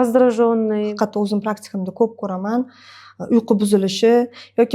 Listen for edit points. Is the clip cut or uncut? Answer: cut